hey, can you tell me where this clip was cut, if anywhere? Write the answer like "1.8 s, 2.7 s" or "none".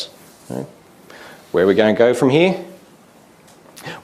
2.5 s

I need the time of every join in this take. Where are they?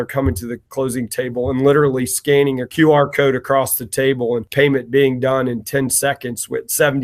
2.7 s, 4.5 s

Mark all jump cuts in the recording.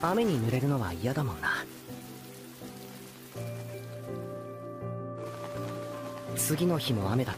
none

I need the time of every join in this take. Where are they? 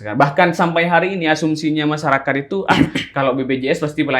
none

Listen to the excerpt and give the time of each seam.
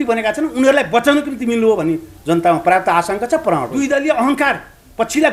3.8 s

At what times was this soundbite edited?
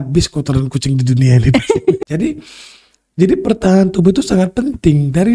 2.0 s

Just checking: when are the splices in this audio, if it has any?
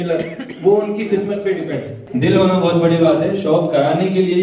2.0 s

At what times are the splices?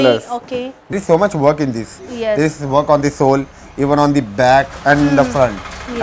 0.9 s

